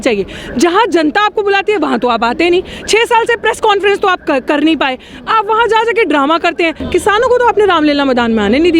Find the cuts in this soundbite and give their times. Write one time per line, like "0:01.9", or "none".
0:06.8